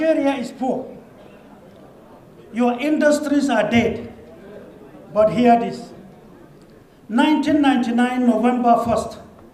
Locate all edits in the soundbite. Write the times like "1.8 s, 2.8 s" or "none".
none